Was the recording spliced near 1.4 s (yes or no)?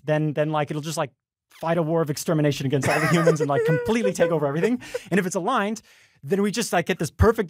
no